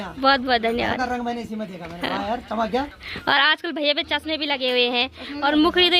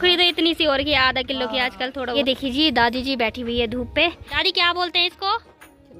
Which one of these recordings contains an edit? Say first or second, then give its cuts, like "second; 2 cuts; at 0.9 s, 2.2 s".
second; 2 cuts; at 2.1 s, 4.4 s